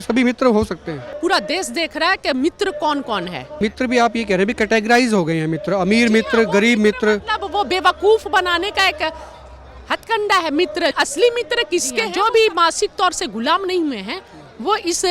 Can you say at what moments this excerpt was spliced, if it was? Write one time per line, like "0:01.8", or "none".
0:01.1
0:03.5
0:10.9
0:12.1